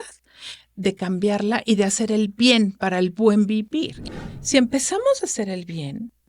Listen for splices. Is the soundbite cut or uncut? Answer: cut